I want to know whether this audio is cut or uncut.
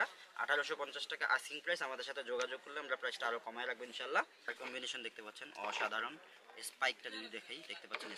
cut